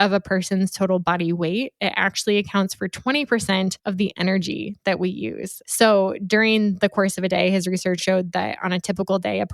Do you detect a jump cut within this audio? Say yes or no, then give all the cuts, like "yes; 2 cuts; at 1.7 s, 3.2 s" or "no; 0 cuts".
yes; 2 cuts; at 5.5 s, 8.0 s